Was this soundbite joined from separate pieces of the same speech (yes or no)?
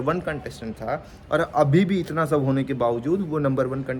no